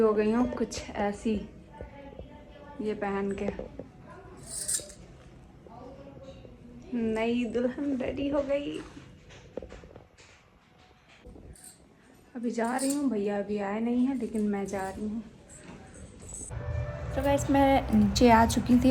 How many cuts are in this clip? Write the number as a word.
zero